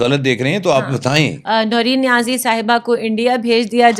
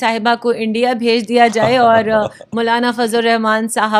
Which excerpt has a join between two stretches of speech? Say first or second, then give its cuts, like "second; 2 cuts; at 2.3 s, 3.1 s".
first; 1 cut; at 1.4 s